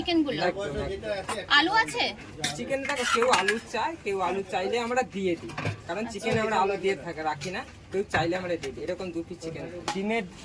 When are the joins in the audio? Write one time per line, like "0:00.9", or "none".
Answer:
none